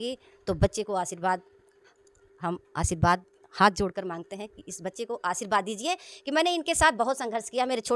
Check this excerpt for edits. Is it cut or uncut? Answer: uncut